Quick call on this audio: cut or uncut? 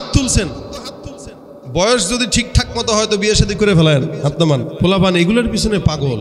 cut